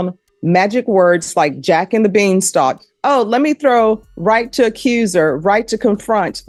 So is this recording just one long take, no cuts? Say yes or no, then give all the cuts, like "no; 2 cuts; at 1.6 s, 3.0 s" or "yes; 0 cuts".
yes; 0 cuts